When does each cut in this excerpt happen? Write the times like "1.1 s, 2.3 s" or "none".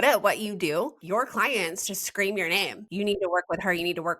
1.0 s, 2.8 s